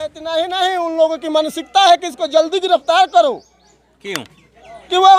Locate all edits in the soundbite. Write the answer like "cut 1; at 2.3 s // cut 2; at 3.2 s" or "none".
none